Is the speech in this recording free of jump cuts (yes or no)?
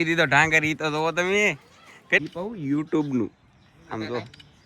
no